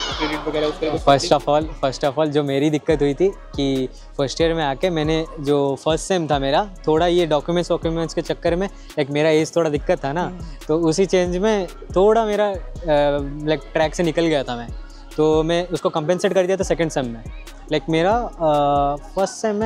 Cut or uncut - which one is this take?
uncut